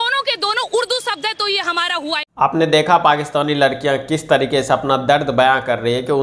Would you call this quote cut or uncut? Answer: uncut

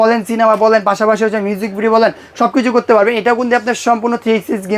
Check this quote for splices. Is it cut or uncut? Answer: uncut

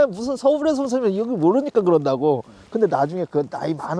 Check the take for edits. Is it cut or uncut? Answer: uncut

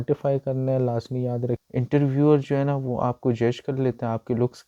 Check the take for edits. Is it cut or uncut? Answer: cut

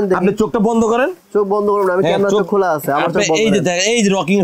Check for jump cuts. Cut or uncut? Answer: uncut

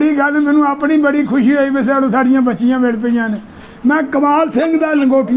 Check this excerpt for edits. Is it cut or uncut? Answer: uncut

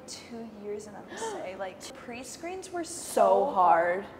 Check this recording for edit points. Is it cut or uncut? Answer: cut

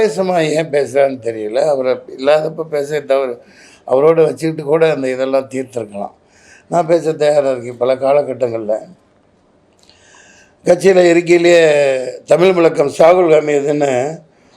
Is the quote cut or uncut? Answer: uncut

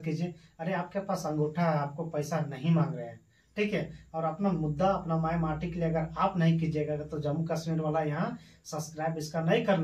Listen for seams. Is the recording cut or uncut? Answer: uncut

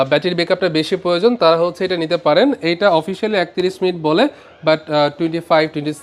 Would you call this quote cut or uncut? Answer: uncut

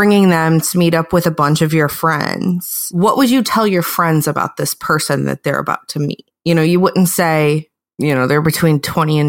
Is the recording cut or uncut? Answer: uncut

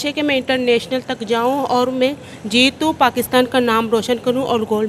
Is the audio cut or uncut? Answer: uncut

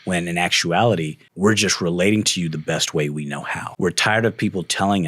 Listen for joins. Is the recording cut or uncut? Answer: cut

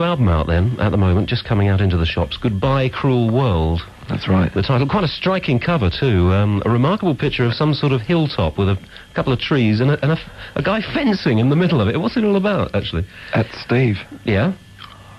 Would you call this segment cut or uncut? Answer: uncut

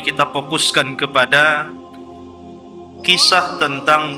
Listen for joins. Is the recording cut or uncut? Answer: cut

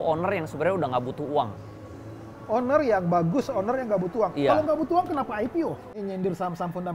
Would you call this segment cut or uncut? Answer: cut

